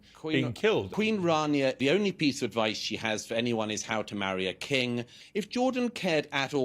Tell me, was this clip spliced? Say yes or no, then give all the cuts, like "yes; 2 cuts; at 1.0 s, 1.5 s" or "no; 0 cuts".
yes; 3 cuts; at 0.9 s, 1.8 s, 5.2 s